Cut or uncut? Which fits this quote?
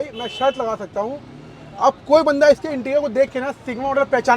uncut